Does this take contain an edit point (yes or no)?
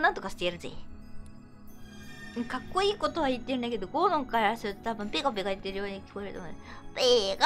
no